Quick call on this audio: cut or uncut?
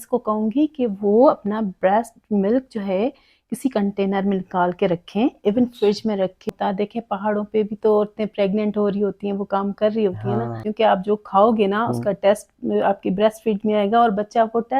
cut